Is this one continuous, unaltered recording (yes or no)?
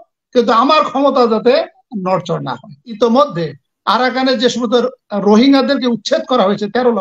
no